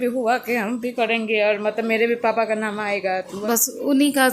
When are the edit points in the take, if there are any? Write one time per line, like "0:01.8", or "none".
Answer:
0:03.4